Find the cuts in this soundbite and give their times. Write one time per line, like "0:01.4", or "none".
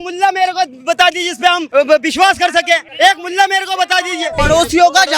0:01.6
0:02.9
0:04.3